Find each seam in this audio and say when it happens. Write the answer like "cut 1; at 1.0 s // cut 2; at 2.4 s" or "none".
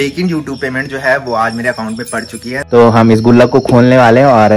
cut 1; at 2.5 s